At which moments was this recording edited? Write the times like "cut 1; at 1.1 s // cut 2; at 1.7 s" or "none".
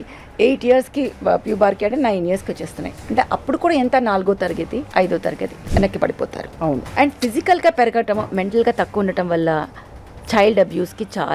cut 1; at 4.9 s // cut 2; at 5.5 s // cut 3; at 6.9 s